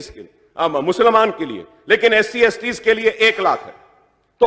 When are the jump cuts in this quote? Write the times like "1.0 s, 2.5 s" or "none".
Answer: 2.1 s